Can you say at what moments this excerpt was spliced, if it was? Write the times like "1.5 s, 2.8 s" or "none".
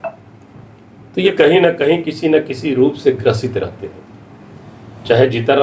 1.3 s